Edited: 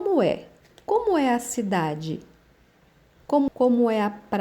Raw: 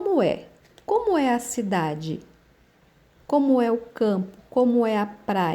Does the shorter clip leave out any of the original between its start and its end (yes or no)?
yes